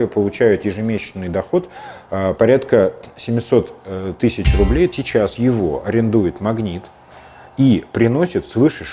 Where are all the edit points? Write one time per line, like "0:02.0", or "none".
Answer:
0:04.9